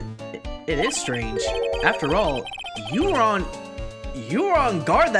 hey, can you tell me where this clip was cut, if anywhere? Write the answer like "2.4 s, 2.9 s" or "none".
none